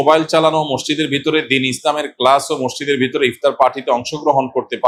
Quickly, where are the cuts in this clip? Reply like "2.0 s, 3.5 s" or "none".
none